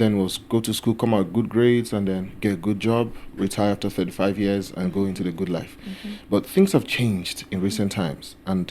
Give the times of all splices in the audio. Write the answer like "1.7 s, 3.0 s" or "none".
none